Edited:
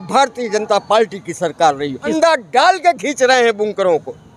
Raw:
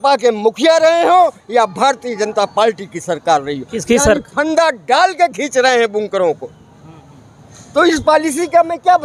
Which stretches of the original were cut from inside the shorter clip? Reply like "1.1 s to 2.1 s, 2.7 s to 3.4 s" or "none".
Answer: 3.7 s to 4.4 s